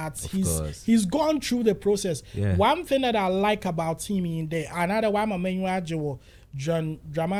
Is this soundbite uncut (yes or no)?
yes